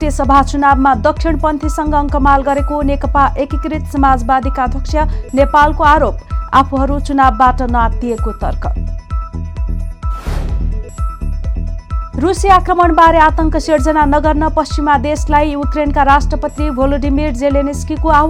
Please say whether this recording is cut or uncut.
uncut